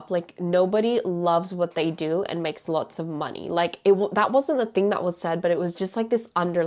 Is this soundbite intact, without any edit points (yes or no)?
yes